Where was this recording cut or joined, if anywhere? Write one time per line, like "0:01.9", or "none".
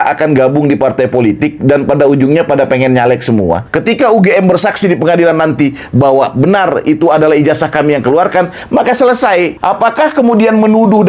0:03.7
0:09.6